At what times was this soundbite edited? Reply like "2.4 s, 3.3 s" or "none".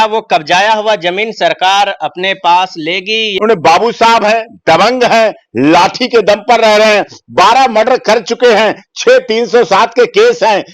3.3 s